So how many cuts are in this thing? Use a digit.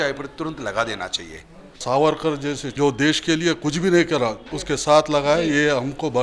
3